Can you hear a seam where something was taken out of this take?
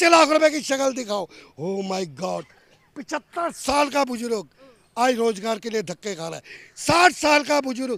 no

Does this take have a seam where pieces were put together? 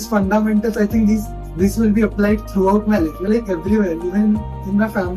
no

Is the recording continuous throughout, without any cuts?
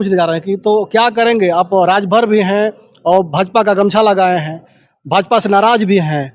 yes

